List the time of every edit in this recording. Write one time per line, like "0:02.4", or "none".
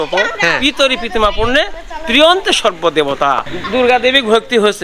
0:03.5